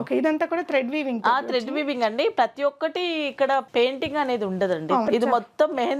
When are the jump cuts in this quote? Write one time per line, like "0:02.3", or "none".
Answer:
0:05.1

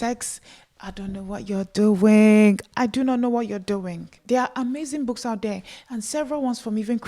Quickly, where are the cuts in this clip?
0:04.1

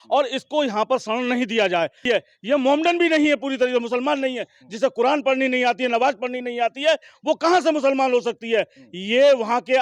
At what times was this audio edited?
0:02.0

